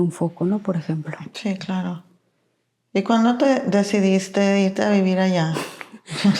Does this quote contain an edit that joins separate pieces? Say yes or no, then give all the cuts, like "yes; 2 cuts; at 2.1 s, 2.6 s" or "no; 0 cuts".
no; 0 cuts